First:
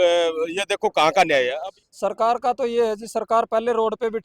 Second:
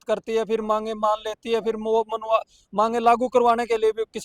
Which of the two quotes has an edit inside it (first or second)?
first